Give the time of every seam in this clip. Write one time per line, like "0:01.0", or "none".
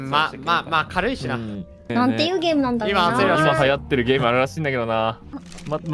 0:01.9